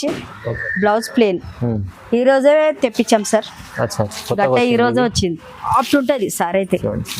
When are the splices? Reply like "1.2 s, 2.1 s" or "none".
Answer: 5.7 s